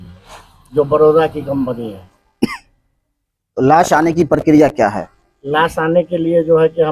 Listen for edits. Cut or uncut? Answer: uncut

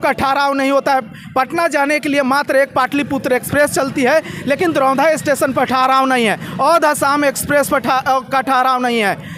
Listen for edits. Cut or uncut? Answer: uncut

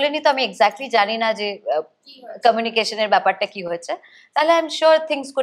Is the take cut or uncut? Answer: uncut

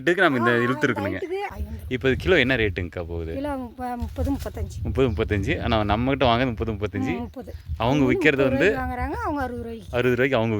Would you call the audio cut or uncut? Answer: cut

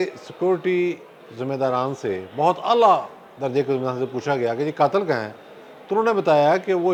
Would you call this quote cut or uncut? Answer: uncut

